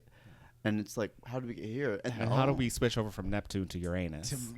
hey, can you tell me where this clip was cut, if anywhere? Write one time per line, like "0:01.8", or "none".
0:02.1